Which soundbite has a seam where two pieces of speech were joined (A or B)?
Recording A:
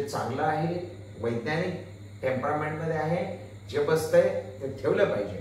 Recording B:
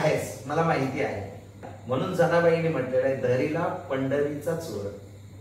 B